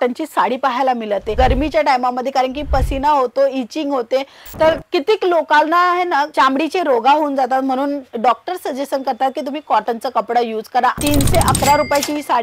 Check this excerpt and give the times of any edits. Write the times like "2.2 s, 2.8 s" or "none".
1.3 s, 11.0 s